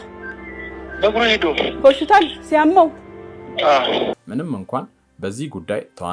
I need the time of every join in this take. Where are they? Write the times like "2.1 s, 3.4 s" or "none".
none